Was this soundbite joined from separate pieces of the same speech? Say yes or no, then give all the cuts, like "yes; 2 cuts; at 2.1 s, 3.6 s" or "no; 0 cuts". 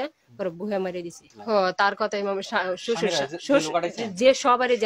yes; 1 cut; at 1.3 s